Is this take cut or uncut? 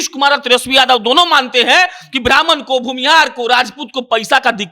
uncut